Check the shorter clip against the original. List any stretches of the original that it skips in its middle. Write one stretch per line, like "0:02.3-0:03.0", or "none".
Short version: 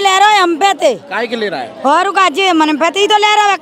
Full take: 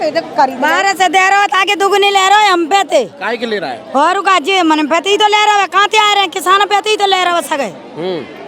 none